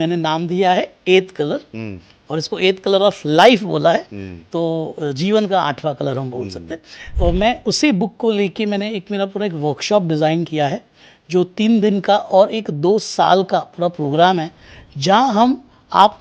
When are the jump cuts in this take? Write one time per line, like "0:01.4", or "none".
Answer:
0:07.1